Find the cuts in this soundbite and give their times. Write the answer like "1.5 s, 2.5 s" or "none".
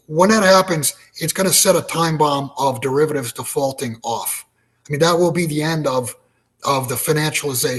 none